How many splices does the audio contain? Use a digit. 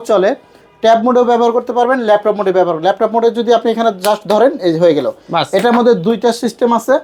0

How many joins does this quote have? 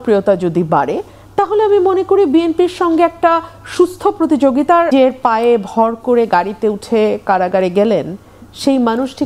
1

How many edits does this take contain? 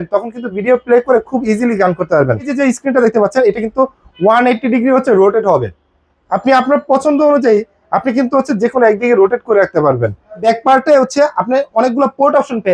2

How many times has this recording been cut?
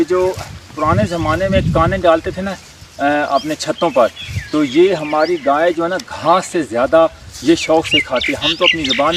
0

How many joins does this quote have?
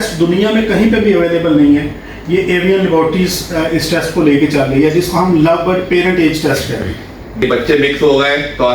1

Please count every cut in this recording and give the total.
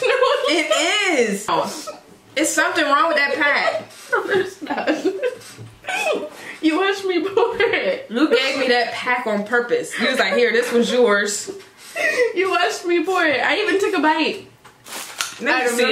1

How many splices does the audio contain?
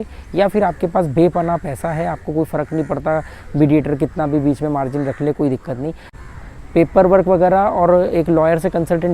1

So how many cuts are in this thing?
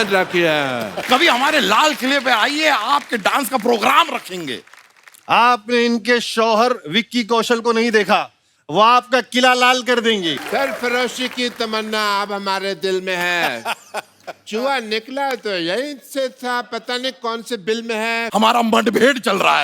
3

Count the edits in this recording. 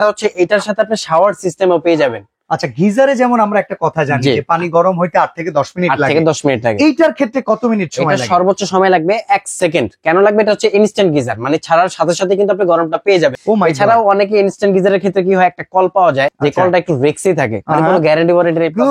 0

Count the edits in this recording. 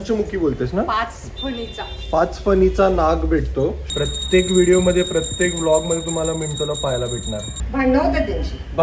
2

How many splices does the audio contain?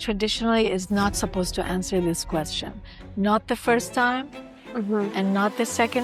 0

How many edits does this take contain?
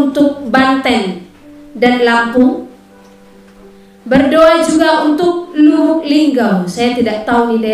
0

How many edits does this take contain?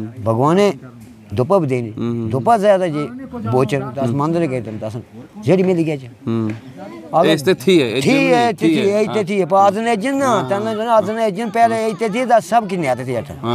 0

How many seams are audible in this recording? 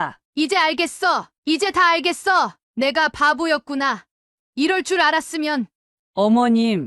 1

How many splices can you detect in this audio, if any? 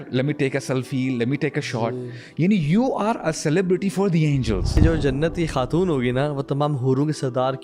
1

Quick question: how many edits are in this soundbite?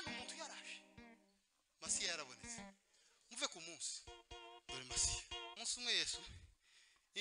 1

